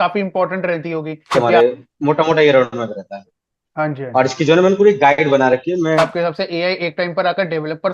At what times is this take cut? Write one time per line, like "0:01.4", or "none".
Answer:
0:01.3
0:06.0